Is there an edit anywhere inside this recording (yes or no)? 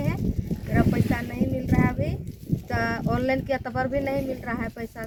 no